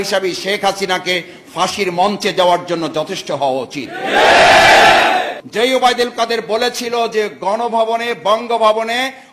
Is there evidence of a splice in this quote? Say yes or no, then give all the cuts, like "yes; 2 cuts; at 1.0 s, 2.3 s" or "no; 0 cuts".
yes; 1 cut; at 5.4 s